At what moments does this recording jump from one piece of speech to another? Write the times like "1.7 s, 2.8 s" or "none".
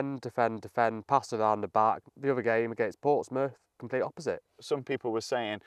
2.0 s, 4.6 s

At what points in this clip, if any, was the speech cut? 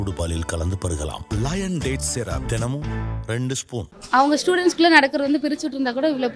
4.0 s

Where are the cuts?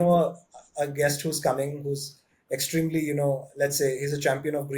none

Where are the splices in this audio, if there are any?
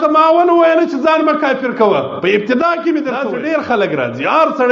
3.2 s

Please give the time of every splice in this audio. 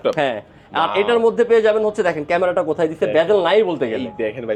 none

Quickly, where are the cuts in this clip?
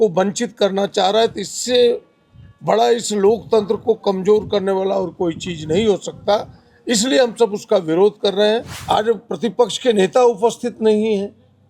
8.7 s

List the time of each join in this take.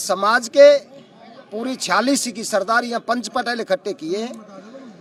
none

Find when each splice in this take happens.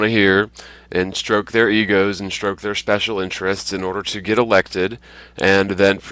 2.3 s

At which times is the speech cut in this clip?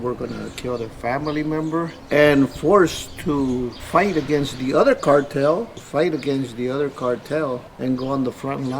2.0 s, 3.8 s, 5.8 s, 7.7 s

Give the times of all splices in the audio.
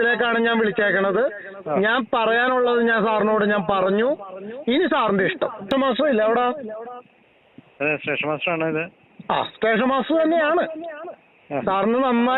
5.7 s

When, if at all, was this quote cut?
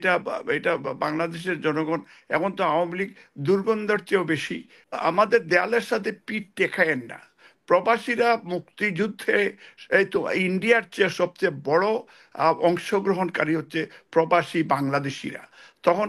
4.8 s

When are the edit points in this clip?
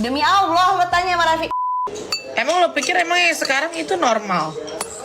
1.6 s

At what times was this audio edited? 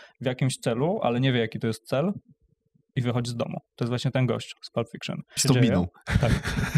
3.7 s, 5.3 s

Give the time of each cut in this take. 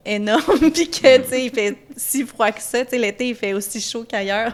none

